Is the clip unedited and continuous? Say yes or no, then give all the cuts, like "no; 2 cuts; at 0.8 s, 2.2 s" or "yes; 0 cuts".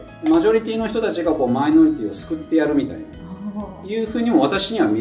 yes; 0 cuts